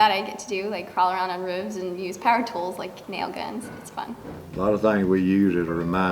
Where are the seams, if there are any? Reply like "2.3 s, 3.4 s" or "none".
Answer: 4.3 s